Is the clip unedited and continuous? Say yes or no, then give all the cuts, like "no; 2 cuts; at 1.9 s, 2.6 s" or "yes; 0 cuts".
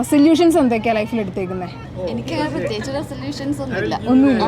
no; 1 cut; at 1.8 s